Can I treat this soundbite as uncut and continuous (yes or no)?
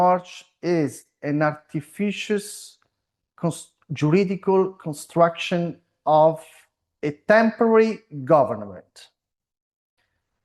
yes